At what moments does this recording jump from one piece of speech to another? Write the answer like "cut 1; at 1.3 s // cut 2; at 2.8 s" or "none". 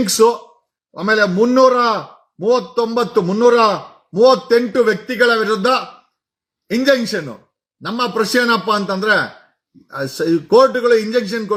none